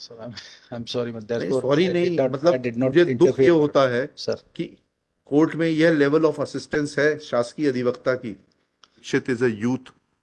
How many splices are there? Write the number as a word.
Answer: one